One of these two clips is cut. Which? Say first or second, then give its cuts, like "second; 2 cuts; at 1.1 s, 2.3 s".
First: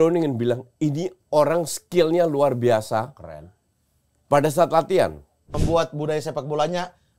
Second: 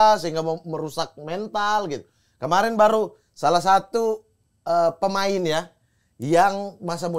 first; 1 cut; at 5.5 s